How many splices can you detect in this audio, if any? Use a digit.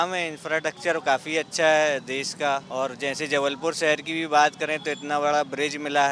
1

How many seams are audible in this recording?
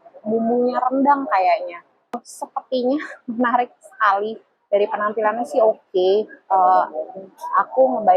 1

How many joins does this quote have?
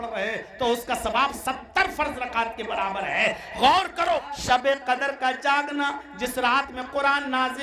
1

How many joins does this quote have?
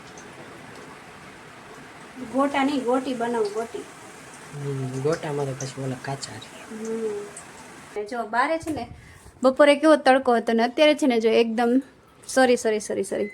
1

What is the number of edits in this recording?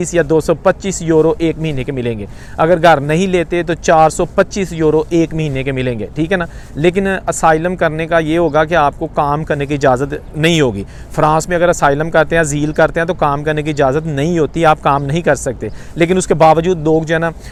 0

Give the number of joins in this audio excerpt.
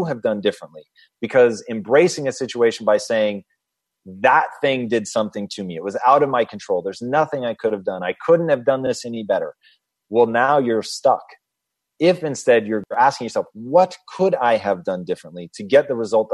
1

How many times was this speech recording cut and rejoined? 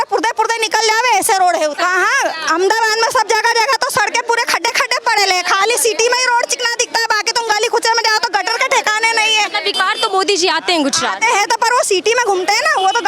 2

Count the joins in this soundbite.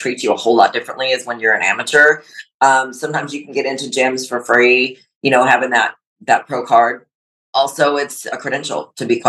1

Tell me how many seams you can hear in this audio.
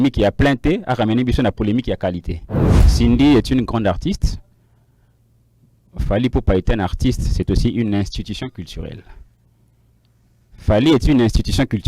1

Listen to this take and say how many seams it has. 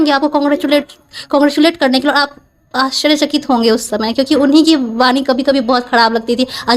0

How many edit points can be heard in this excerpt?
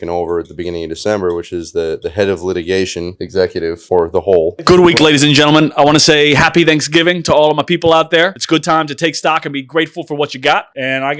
1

